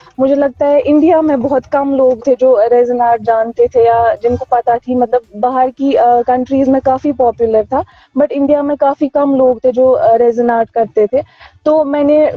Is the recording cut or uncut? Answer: uncut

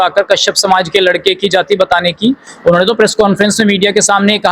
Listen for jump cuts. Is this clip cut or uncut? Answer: uncut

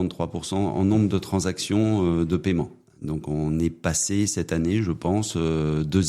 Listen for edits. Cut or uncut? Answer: cut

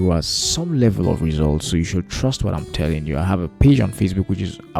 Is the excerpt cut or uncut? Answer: uncut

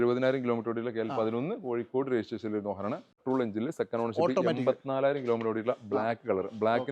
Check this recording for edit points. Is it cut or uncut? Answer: cut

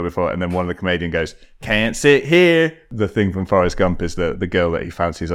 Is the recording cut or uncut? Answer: cut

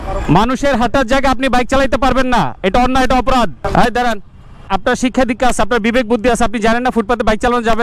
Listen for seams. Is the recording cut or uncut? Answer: cut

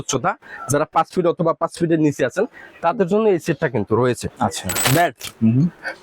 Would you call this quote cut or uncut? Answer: cut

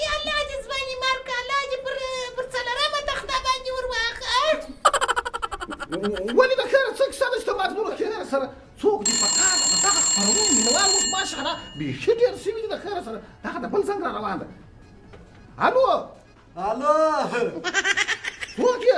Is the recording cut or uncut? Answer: cut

